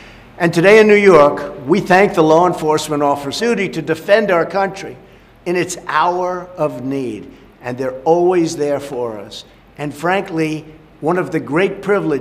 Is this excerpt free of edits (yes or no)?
yes